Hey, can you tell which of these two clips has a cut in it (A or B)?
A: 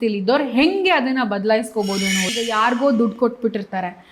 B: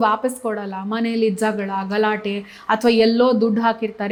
A